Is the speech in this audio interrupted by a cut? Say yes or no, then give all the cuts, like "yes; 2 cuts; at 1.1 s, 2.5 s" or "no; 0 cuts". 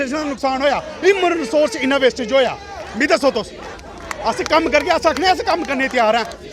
no; 0 cuts